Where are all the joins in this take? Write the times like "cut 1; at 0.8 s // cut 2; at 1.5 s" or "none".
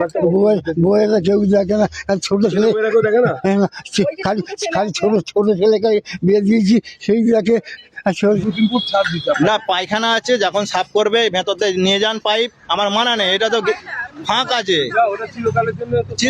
cut 1; at 8.3 s